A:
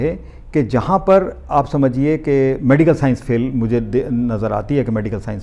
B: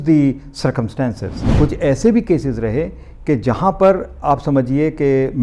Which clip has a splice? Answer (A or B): B